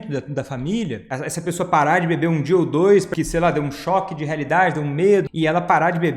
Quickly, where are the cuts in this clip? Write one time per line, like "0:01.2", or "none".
0:01.0
0:03.1
0:05.3